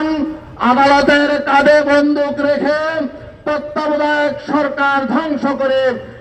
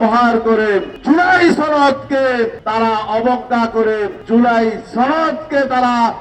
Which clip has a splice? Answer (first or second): second